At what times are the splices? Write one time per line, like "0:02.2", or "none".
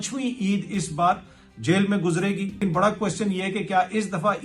0:02.6